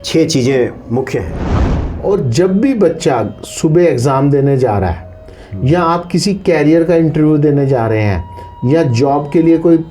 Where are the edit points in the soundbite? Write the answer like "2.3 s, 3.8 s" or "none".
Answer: 1.5 s

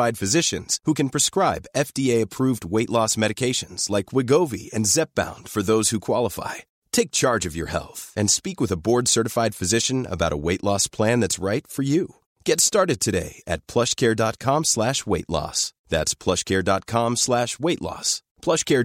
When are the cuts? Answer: none

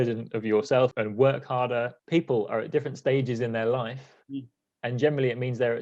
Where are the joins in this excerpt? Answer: 0.9 s, 2.0 s

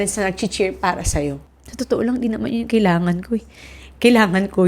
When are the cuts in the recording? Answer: 1.4 s

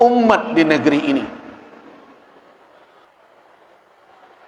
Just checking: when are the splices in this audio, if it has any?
3.0 s

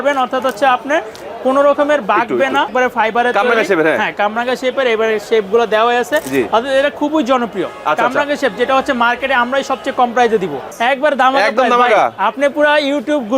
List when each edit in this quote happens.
2.7 s, 10.7 s

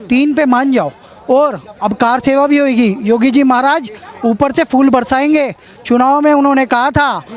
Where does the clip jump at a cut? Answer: none

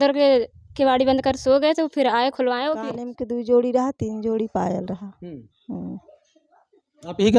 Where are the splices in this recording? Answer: 2.8 s

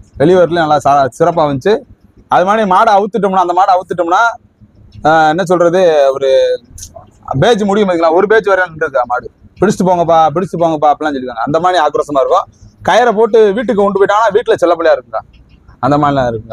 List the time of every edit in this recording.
none

